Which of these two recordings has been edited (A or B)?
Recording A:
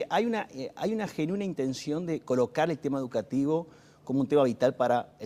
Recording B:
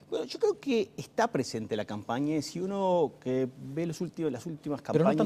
B